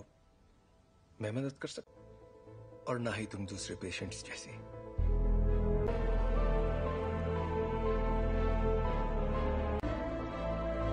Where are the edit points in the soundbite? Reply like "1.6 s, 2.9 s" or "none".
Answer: 5.9 s